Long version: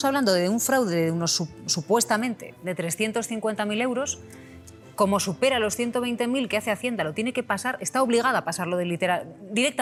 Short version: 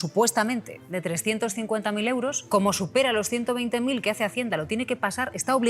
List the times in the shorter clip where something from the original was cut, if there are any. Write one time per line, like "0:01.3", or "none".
0:02.4